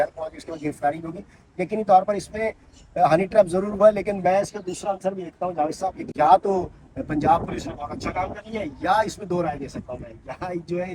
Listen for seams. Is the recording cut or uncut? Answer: uncut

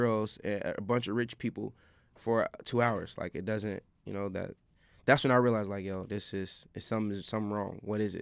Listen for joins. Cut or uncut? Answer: uncut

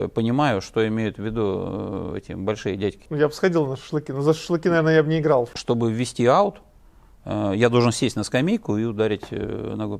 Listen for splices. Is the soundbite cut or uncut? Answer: cut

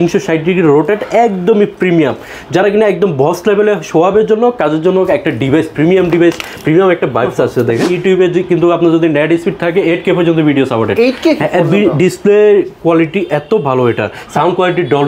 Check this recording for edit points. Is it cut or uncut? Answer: cut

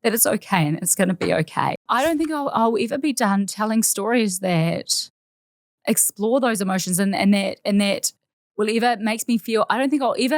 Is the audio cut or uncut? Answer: cut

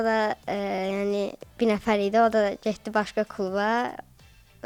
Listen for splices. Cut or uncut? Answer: uncut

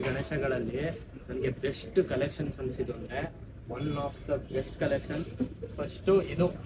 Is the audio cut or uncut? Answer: uncut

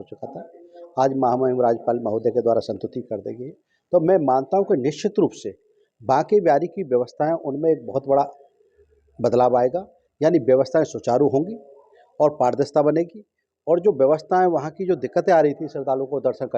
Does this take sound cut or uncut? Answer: uncut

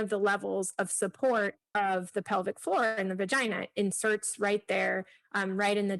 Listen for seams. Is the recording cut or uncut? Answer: cut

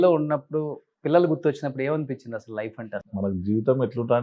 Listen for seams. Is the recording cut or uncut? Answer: cut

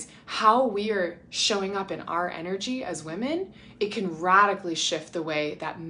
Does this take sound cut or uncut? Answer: uncut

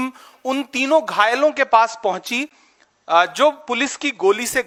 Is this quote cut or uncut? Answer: uncut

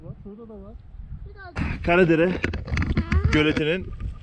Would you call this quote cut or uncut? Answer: cut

